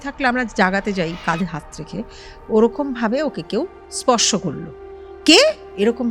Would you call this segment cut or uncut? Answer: cut